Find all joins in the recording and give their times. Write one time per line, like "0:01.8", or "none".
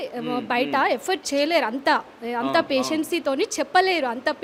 none